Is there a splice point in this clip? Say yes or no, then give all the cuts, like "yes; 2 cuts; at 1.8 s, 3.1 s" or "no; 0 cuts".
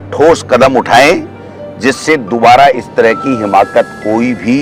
no; 0 cuts